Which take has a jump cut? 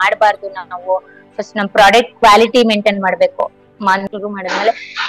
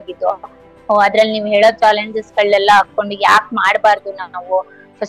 first; 1 cut; at 4.0 s

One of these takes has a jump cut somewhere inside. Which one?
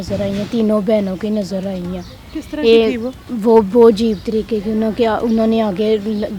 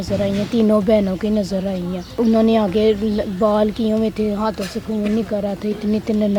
second; 1 cut; at 2.2 s

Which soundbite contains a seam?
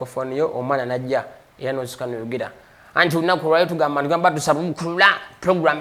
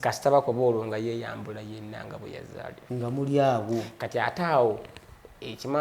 second; 1 cut; at 2.8 s

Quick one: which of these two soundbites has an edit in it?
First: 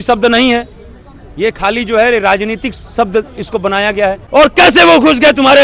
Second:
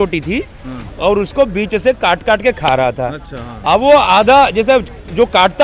first; 1 cut; at 4.3 s

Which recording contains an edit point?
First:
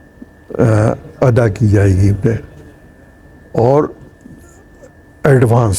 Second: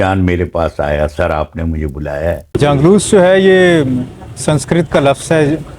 second; 1 cut; at 2.6 s

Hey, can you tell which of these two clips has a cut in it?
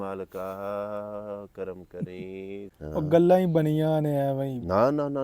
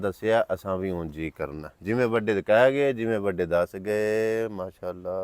first; 1 cut; at 2.7 s

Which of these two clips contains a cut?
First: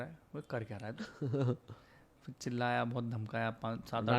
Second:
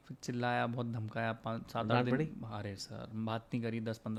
first; 1 cut; at 1.0 s

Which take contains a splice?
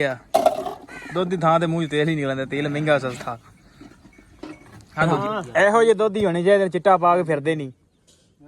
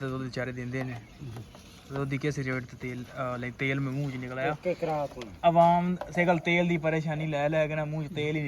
first; 1 cut; at 4.9 s

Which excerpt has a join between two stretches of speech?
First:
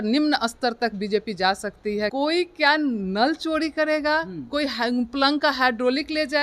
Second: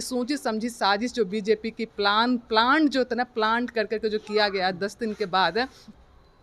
first; 1 cut; at 2.1 s

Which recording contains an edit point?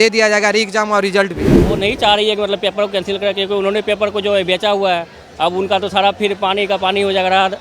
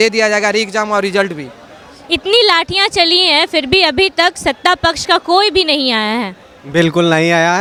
first; 1 cut; at 1.7 s

